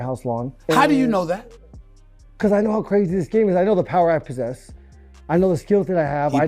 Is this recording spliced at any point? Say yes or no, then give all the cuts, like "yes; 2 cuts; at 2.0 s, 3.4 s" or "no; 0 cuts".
no; 0 cuts